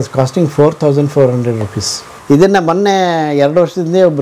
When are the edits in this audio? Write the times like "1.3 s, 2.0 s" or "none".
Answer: 2.1 s